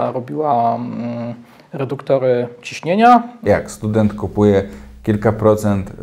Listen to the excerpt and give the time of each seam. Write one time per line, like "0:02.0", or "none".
0:03.4